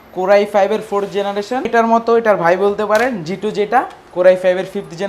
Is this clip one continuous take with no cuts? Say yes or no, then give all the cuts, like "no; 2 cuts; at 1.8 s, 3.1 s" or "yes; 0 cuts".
no; 1 cut; at 1.7 s